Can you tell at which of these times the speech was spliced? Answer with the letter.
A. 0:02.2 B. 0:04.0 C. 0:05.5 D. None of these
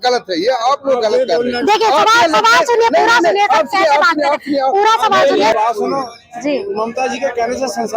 C